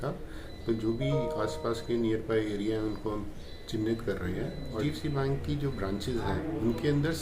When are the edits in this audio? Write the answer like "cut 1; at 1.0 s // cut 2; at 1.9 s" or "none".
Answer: cut 1; at 4.8 s